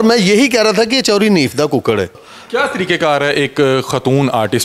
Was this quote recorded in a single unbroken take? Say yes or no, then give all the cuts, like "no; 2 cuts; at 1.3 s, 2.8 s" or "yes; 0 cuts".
no; 1 cut; at 2.3 s